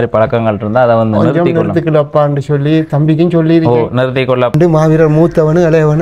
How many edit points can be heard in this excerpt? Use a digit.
1